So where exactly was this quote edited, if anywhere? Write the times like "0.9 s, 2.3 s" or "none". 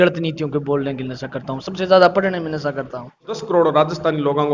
3.4 s